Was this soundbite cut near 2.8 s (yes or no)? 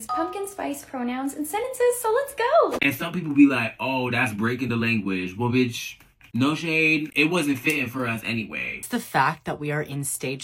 yes